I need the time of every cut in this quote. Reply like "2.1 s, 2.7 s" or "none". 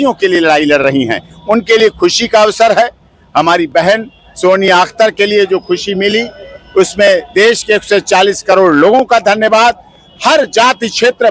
none